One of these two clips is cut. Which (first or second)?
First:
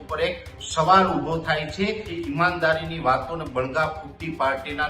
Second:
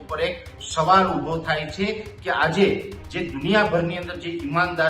first